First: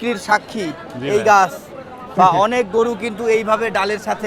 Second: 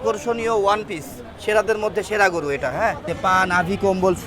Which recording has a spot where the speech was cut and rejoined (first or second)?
second